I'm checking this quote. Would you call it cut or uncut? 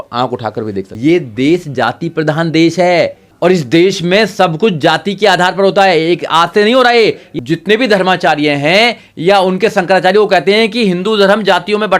cut